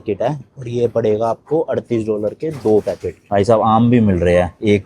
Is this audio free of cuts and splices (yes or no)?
no